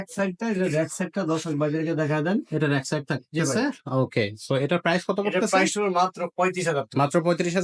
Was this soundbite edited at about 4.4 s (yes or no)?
no